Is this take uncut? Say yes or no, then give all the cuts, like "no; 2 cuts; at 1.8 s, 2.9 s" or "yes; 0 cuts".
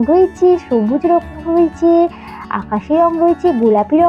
yes; 0 cuts